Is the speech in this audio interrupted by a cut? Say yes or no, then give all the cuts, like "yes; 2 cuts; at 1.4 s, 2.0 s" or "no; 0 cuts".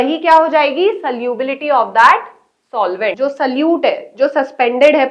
yes; 1 cut; at 3.1 s